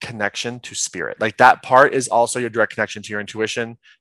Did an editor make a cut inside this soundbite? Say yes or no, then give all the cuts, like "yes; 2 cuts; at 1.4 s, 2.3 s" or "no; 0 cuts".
yes; 1 cut; at 1.2 s